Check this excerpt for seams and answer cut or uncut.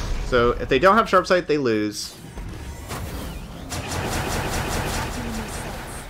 uncut